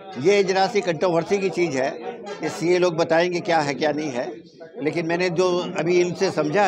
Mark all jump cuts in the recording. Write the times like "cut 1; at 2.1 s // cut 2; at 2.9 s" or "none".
none

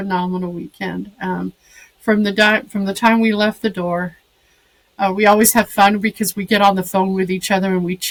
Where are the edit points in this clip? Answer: none

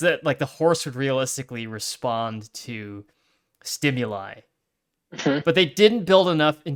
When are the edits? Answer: none

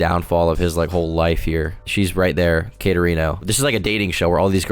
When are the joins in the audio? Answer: none

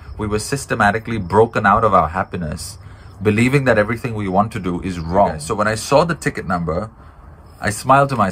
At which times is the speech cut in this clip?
cut 1; at 5.4 s

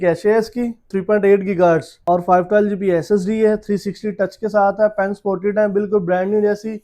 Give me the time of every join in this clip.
cut 1; at 0.9 s // cut 2; at 2.0 s

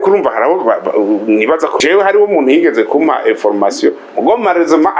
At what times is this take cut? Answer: cut 1; at 1.7 s

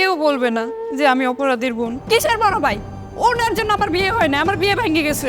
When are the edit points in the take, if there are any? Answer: cut 1; at 2.0 s

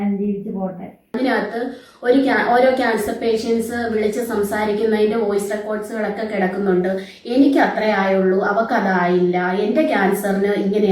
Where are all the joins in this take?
cut 1; at 0.9 s

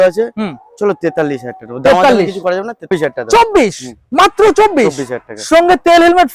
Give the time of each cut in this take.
cut 1; at 2.9 s

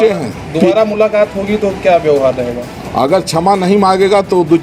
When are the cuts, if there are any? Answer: cut 1; at 2.6 s

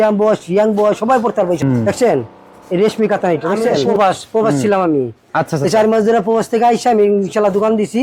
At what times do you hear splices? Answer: cut 1; at 1.6 s // cut 2; at 3.9 s

